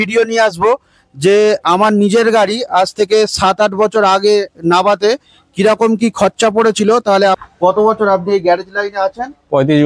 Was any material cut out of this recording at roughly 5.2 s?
no; 1 cut; at 7.4 s

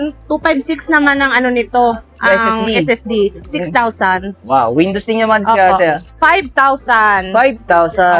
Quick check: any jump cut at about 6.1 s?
yes; 1 cut; at 6.1 s

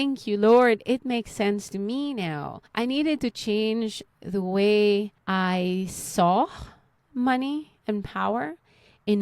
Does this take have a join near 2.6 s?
yes; 2 cuts; at 2.6 s, 5.2 s

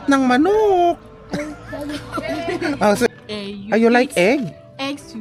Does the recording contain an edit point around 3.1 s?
yes; 1 cut; at 3.1 s

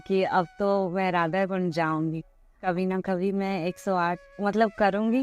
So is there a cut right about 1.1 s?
no; 1 cut; at 2.7 s

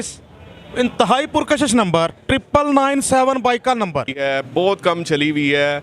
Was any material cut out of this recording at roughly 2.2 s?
no; 1 cut; at 4.3 s

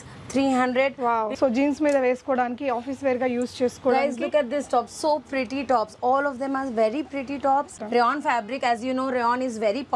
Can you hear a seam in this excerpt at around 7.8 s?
yes; 2 cuts; at 1.3 s, 7.8 s

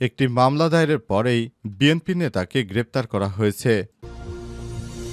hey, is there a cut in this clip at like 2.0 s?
no; 1 cut; at 4.0 s

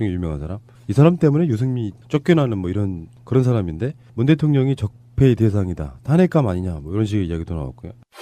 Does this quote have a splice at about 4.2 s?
no; 1 cut; at 6.3 s

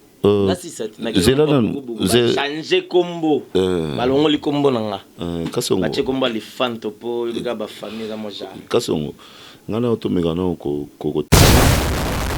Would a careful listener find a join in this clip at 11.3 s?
yes; 1 cut; at 11.3 s

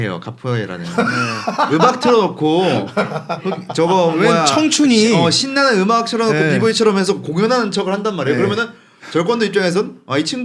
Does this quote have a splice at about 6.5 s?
no; 0 cuts

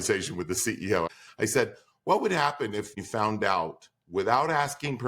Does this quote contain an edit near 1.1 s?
yes; 2 cuts; at 1.1 s, 3.0 s

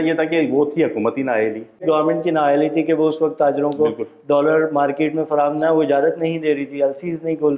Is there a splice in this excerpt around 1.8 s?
yes; 1 cut; at 1.8 s

